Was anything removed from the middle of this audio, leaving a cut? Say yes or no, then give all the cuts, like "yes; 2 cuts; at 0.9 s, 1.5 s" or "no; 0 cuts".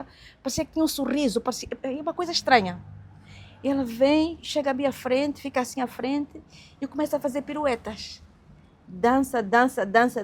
no; 0 cuts